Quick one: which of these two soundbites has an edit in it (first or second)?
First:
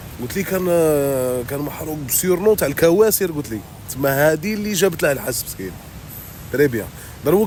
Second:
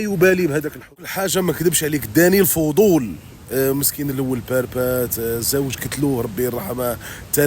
second